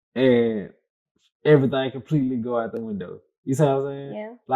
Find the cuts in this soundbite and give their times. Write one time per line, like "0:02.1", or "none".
none